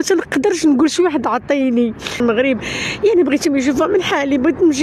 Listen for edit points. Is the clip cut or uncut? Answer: cut